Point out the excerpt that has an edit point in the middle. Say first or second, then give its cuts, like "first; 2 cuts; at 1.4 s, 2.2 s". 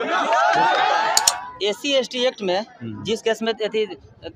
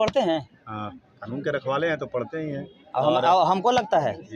first; 1 cut; at 1.2 s